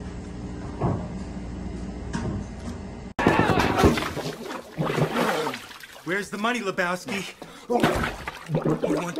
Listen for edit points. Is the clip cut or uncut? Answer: uncut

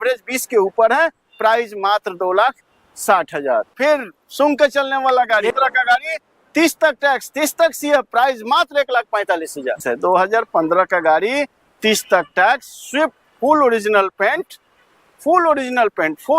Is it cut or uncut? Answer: cut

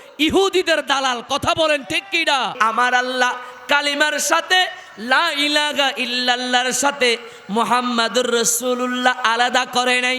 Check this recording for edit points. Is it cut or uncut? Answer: cut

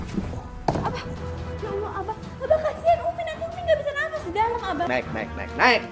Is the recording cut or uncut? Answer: cut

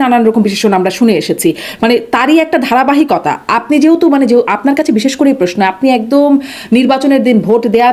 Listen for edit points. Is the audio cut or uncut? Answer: uncut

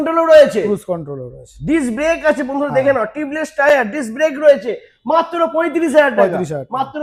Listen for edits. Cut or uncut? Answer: uncut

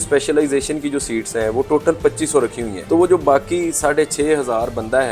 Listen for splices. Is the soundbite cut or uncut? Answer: cut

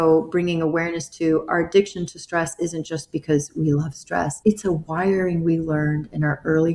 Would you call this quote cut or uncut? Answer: uncut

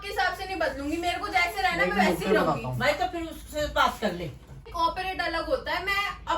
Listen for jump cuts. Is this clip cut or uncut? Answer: cut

